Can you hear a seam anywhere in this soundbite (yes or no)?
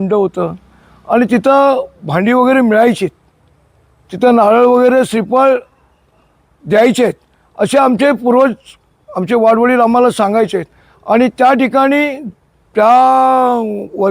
no